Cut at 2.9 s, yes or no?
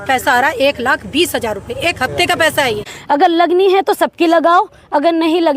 yes